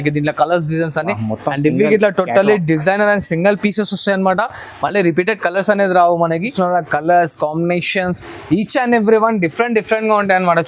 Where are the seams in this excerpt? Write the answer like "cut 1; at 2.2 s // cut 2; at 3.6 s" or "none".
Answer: cut 1; at 6.5 s